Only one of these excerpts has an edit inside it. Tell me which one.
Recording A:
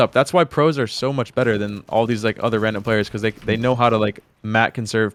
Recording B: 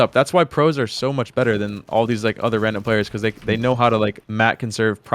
B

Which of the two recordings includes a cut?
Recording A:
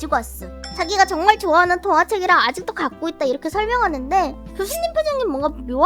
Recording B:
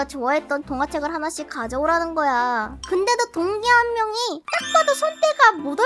B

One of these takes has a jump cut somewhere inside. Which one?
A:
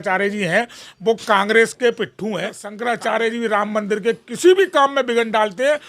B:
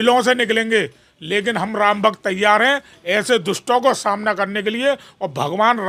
A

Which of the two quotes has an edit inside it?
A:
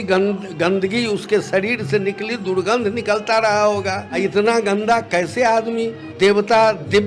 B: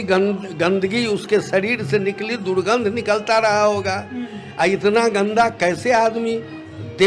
A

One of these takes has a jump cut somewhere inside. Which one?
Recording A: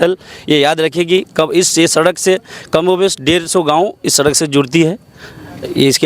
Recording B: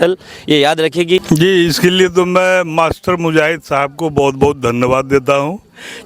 B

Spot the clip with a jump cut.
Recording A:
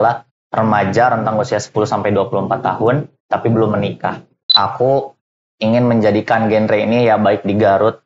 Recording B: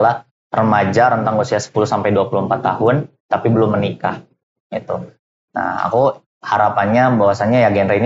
A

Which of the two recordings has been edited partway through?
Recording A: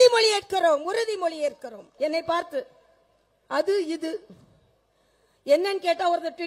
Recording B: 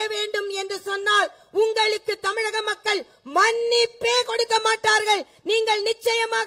A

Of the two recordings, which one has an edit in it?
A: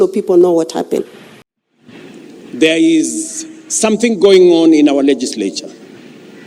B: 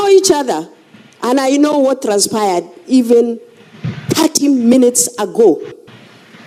A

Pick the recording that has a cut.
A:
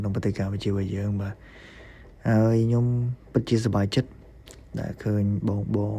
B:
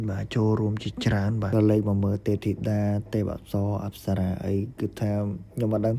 B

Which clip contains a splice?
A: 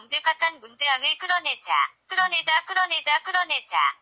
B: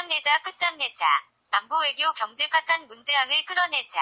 B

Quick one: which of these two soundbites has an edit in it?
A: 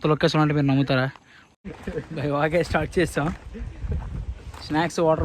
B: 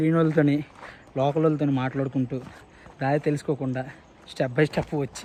A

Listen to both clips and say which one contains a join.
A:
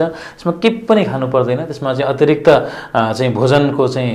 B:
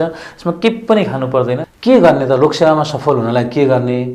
B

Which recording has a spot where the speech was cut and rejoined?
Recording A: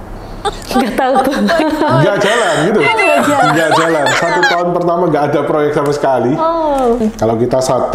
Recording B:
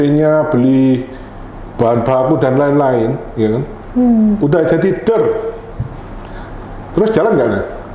A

